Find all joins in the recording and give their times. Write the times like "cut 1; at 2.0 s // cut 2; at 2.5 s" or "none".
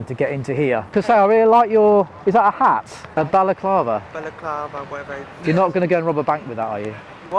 cut 1; at 0.8 s // cut 2; at 3.0 s